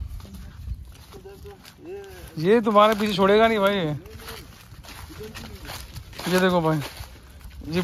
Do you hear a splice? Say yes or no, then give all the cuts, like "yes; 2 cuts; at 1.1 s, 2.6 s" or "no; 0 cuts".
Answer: no; 0 cuts